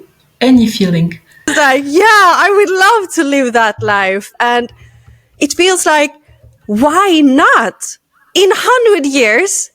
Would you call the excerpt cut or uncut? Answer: cut